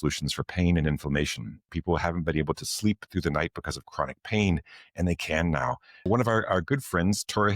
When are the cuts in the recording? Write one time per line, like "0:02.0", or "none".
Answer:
0:01.6
0:06.1